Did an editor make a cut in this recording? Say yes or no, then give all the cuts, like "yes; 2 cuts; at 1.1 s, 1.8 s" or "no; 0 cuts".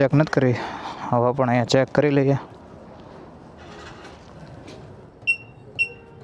no; 0 cuts